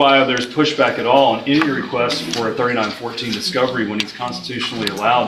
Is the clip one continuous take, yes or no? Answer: yes